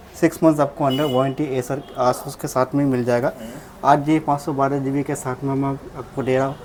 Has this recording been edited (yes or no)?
no